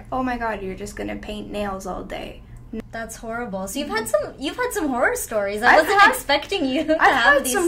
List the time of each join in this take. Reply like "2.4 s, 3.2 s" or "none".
2.8 s